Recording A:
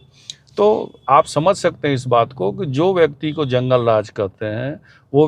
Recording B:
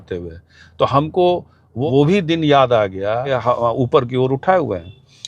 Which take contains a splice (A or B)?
B